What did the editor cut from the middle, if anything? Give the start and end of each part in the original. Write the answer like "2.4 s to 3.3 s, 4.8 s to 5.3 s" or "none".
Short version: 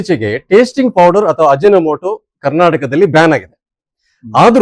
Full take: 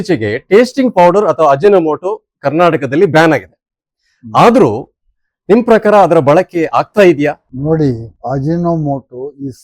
none